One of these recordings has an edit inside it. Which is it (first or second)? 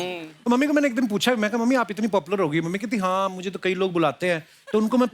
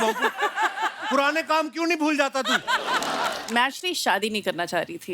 second